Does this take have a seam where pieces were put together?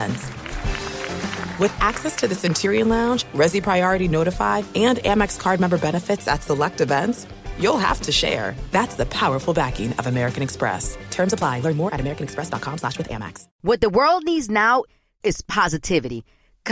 yes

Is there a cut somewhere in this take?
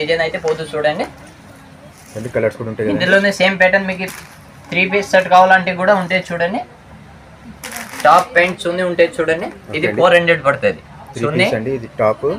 no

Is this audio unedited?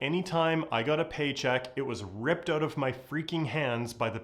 yes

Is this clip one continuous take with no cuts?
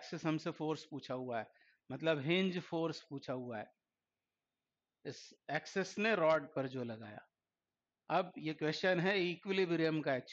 yes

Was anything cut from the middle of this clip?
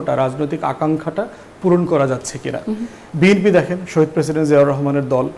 no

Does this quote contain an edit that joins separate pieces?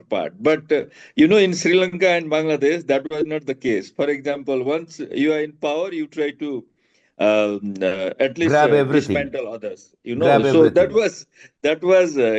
no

